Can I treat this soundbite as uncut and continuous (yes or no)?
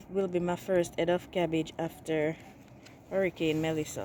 yes